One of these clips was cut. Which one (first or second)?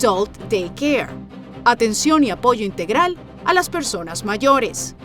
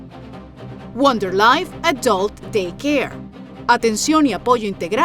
second